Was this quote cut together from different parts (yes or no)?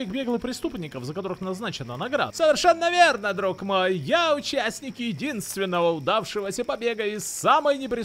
yes